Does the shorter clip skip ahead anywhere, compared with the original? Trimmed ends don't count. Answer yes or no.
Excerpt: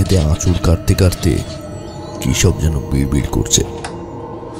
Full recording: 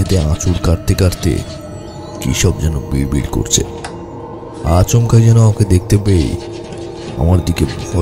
no